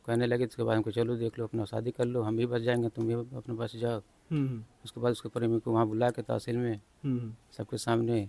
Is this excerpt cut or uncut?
uncut